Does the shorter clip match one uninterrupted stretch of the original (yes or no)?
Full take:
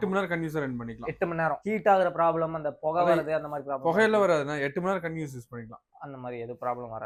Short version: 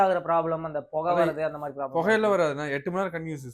yes